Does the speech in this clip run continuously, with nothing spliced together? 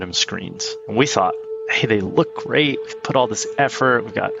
yes; 0 cuts

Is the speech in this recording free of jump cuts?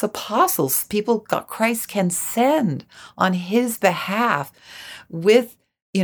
yes; 0 cuts

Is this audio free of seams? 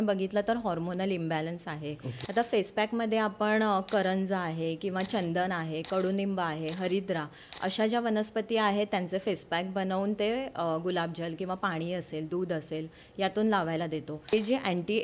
no; 2 cuts; at 2.1 s, 14.3 s

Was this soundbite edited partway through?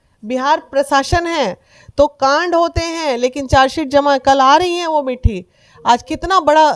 no; 0 cuts

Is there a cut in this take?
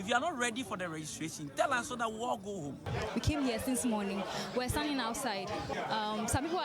yes; 2 cuts; at 2.9 s, 5.7 s

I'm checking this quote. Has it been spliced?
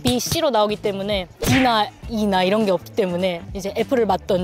yes; 1 cut; at 3.4 s

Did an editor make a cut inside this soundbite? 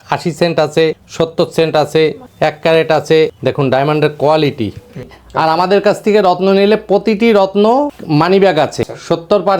yes; 4 cuts; at 1.0 s, 2.2 s, 3.4 s, 5.2 s

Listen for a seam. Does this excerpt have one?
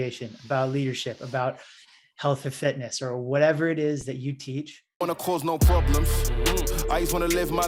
yes; 1 cut; at 5.1 s

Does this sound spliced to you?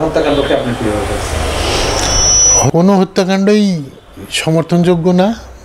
yes; 1 cut; at 2.7 s

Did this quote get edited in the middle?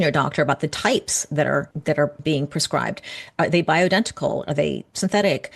yes; 1 cut; at 1.7 s

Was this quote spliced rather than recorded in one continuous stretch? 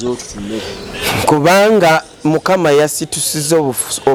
no; 0 cuts

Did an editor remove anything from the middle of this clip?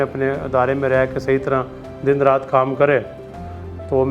no; 0 cuts

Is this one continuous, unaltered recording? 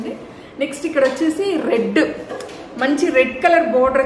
yes; 0 cuts

